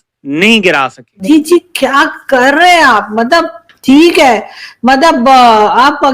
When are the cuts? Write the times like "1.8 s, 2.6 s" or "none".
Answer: 1.1 s